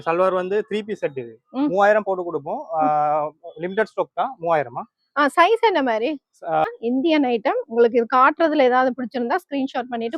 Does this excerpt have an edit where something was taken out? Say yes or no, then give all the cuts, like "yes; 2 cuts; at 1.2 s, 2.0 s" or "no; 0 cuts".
yes; 1 cut; at 6.7 s